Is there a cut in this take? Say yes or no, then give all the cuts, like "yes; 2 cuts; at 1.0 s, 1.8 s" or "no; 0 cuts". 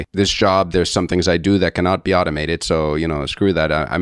no; 0 cuts